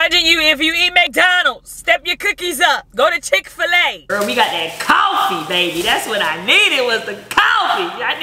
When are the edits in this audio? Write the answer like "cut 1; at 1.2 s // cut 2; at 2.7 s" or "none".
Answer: cut 1; at 1.1 s // cut 2; at 2.9 s // cut 3; at 4.0 s